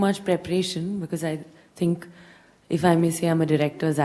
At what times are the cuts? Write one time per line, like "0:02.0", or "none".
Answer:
none